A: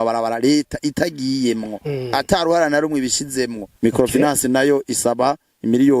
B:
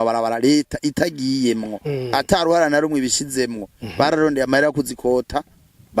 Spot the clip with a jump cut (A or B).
A